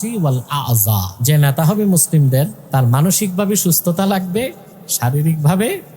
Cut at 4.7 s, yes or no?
no